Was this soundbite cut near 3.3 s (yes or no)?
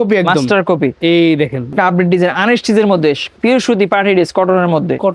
yes